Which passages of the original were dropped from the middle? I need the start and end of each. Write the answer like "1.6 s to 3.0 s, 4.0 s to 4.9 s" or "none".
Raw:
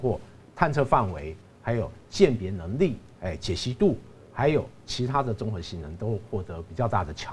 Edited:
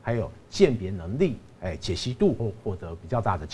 4.0 s to 6.1 s